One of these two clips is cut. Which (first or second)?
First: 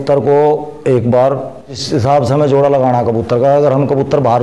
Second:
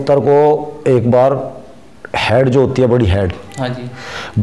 first